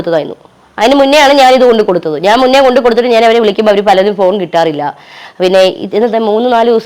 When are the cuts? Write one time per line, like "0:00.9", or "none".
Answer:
none